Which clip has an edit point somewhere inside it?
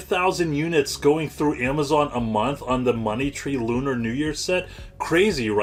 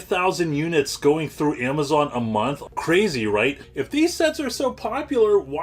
second; 2 cuts; at 2.6 s, 3.7 s

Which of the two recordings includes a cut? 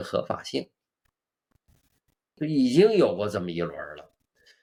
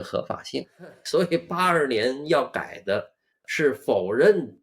second; 1 cut; at 1.0 s

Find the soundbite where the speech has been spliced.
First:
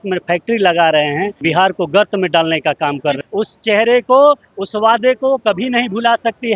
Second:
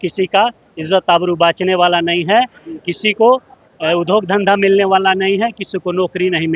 first; 2 cuts; at 1.3 s, 3.2 s

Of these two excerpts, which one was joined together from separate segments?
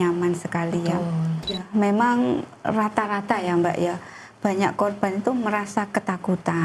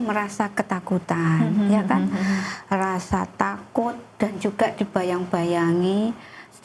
first; 1 cut; at 1.7 s

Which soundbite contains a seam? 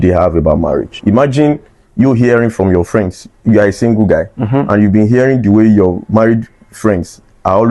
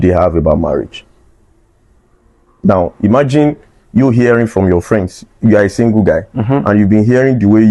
first; 1 cut; at 1.0 s

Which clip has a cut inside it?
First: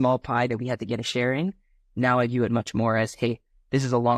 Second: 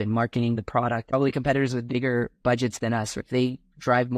second; 2 cuts; at 1.1 s, 3.2 s

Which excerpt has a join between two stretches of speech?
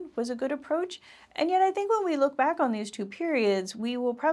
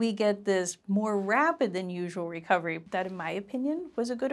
second; 1 cut; at 2.8 s

